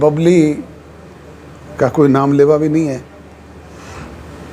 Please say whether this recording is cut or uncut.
uncut